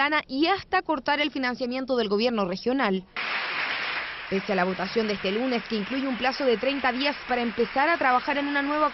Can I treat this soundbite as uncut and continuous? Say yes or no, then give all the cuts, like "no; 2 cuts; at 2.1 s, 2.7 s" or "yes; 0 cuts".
yes; 0 cuts